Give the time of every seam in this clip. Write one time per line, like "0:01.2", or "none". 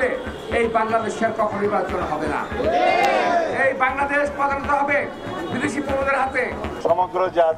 0:06.7